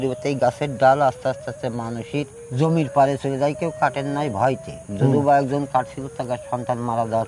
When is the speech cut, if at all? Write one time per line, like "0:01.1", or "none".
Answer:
0:02.4